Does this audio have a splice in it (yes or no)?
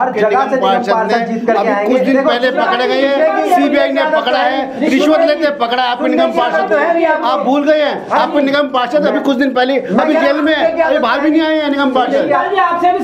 no